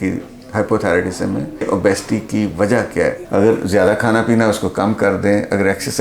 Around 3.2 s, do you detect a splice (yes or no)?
yes